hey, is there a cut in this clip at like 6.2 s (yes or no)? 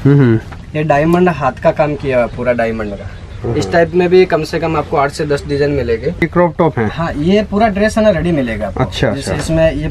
yes